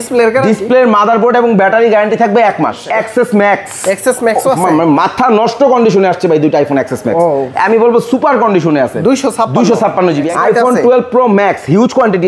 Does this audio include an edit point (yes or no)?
yes